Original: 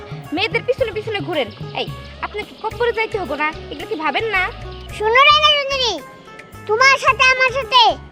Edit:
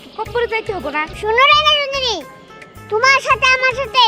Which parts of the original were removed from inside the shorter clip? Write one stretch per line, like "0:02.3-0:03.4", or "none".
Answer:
0:03.6-0:04.9